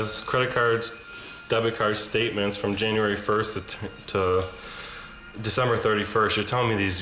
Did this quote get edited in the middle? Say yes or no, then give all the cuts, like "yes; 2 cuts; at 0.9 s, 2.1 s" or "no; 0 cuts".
no; 0 cuts